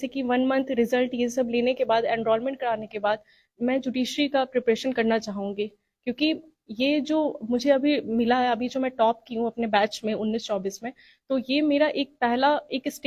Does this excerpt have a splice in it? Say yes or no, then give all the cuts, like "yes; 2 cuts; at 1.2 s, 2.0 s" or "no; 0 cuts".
no; 0 cuts